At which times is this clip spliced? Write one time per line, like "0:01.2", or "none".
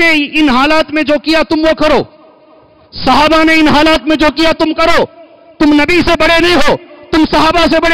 none